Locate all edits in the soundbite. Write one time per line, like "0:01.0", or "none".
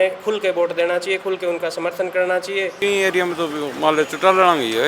0:02.8